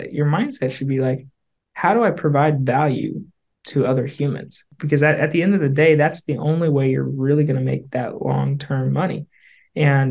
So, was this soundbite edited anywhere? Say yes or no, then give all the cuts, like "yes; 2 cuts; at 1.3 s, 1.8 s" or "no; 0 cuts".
yes; 1 cut; at 4.7 s